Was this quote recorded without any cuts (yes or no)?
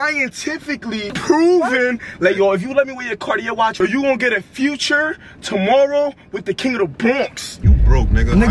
no